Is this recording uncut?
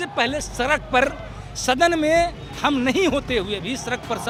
yes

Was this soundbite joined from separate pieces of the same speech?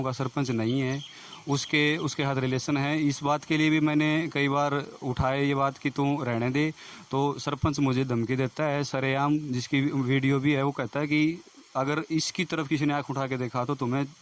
no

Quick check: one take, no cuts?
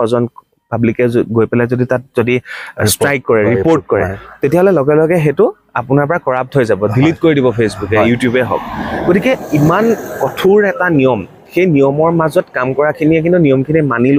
yes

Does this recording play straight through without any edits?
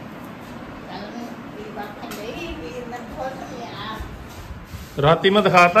yes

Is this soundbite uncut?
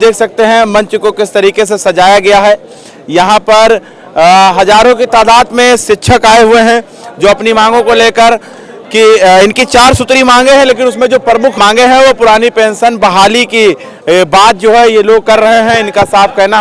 yes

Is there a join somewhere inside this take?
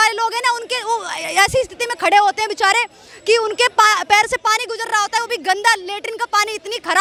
no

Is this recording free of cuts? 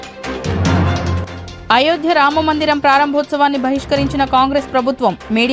yes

